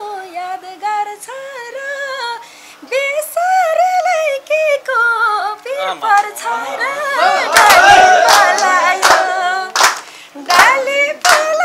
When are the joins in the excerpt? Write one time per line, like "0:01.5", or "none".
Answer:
none